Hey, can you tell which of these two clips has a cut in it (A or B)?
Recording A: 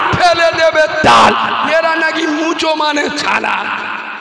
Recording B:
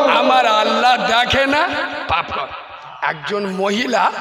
B